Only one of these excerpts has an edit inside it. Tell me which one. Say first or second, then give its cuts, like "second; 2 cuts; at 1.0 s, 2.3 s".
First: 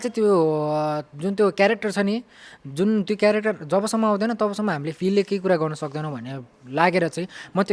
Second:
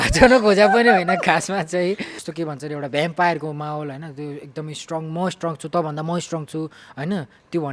second; 1 cut; at 2.1 s